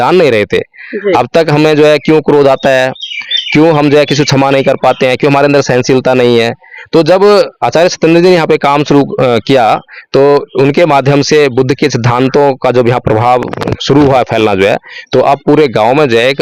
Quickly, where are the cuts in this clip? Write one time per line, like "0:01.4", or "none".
0:13.6